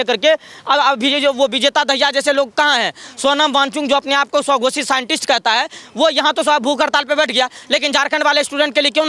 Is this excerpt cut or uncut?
uncut